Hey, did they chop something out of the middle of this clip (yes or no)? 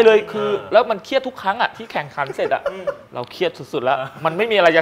yes